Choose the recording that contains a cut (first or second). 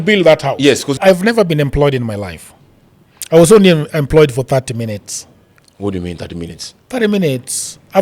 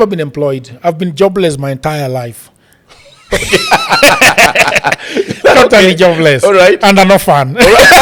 first